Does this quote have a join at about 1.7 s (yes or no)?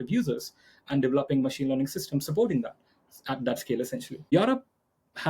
no